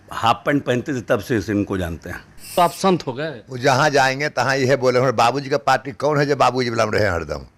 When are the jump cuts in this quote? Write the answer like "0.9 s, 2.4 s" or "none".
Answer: 2.5 s